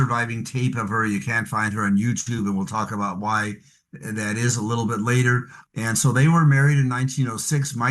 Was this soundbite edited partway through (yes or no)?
yes